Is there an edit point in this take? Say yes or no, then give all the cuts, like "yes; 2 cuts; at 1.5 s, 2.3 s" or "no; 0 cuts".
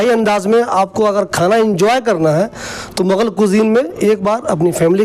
no; 0 cuts